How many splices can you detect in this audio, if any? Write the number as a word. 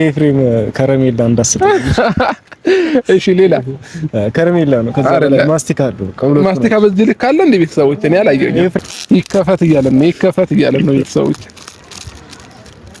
one